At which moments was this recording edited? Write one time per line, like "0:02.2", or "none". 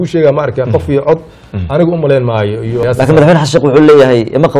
0:02.8

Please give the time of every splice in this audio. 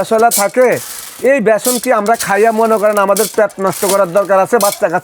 none

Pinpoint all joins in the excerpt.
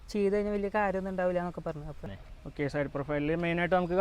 0:02.0

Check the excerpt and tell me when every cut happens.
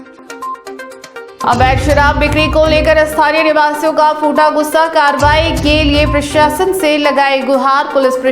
none

